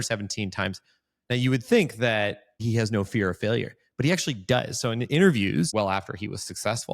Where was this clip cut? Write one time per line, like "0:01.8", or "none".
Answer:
0:02.6
0:05.7